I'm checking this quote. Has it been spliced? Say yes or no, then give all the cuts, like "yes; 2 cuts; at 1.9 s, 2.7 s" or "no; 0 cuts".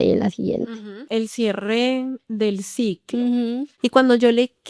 yes; 2 cuts; at 1.0 s, 3.7 s